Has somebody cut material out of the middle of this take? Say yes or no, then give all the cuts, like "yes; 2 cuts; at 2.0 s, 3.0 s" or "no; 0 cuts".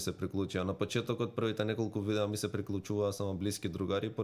no; 0 cuts